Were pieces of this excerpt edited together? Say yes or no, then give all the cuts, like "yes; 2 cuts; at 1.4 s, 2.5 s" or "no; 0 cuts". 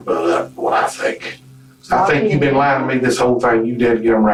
no; 0 cuts